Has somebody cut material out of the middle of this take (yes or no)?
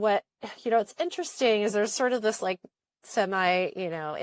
yes